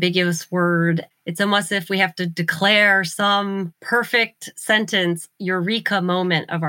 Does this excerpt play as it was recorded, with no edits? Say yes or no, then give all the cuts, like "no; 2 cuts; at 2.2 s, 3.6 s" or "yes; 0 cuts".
no; 2 cuts; at 1.1 s, 3.8 s